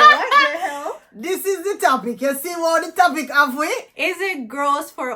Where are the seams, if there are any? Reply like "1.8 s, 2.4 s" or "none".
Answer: 3.9 s